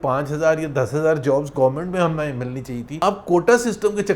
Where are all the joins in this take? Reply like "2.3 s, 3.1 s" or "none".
3.0 s